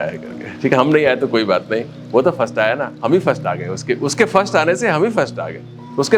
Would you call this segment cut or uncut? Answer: uncut